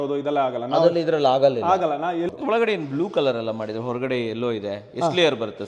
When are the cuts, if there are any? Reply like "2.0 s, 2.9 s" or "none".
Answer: 2.3 s